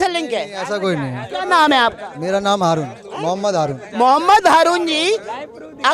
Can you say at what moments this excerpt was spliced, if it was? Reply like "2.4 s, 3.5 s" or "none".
none